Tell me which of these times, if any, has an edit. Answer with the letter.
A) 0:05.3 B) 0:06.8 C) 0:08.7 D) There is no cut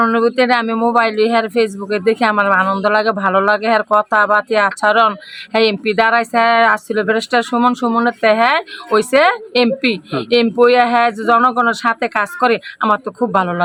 D